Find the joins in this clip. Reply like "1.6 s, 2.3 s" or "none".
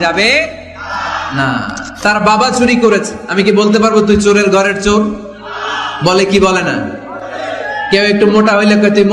1.8 s